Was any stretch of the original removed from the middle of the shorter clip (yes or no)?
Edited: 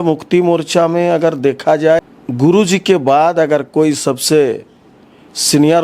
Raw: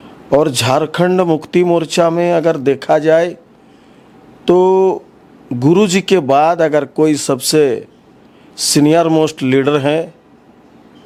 yes